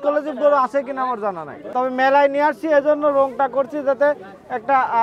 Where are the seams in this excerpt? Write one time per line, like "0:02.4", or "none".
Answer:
0:01.7